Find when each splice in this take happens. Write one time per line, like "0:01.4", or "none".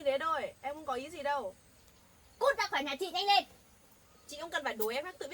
none